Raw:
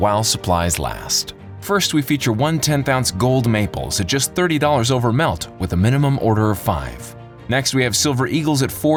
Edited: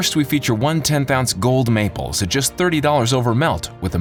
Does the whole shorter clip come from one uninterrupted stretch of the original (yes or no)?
yes